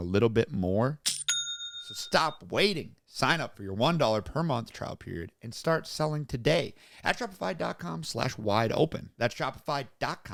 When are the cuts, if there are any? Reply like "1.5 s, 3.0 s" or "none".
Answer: none